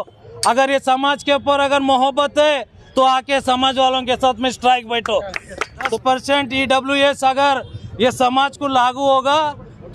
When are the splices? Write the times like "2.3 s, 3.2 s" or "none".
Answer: 2.8 s, 5.9 s